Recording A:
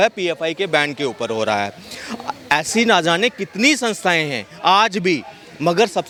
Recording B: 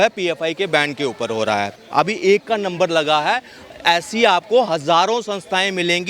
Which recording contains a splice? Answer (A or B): B